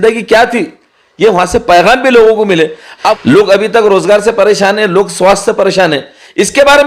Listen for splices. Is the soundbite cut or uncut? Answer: cut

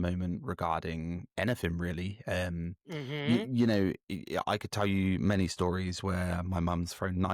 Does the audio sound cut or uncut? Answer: uncut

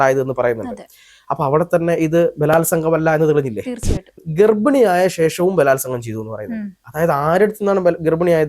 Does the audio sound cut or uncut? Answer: cut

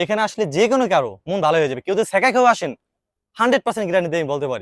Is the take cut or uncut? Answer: uncut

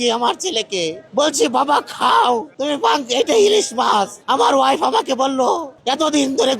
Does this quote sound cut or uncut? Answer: cut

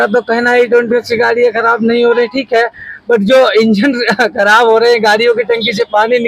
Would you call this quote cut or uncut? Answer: uncut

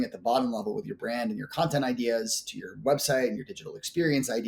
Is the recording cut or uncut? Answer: uncut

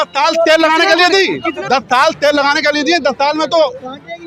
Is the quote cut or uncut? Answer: cut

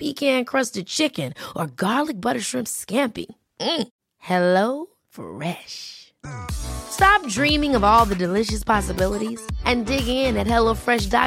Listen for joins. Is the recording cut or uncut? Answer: uncut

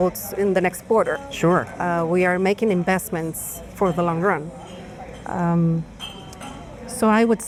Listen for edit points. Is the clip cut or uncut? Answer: uncut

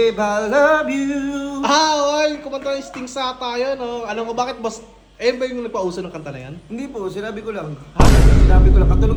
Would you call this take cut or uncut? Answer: uncut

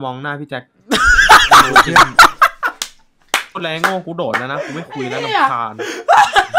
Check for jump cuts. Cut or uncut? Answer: uncut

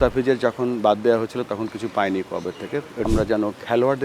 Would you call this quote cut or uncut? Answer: cut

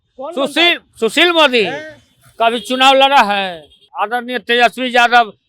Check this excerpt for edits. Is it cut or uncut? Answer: cut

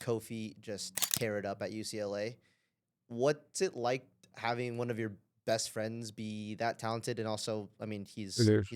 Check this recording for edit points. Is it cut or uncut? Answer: uncut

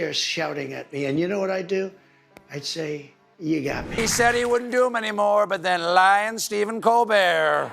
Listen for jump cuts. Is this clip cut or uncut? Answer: cut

